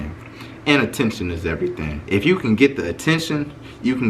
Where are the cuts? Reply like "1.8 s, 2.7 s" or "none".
1.9 s